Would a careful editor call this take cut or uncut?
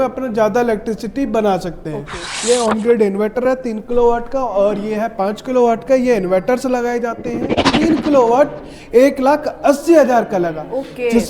cut